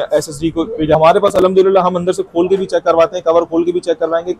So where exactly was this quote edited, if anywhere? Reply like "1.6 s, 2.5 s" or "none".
0.9 s